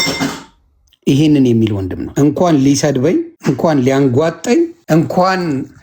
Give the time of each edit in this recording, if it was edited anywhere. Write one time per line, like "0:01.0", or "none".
0:02.0
0:03.3
0:04.8